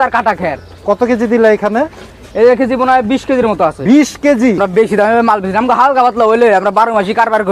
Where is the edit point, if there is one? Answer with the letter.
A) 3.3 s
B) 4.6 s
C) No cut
B